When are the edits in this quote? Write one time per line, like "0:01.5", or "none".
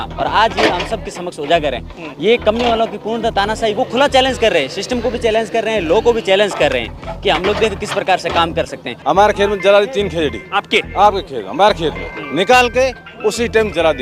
0:08.8